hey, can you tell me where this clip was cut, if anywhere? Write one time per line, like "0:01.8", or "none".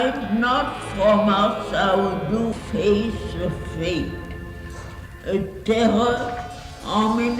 0:02.5